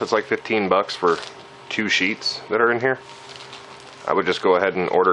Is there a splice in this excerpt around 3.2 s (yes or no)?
yes